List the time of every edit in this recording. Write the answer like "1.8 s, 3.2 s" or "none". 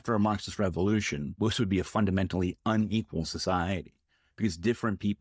1.2 s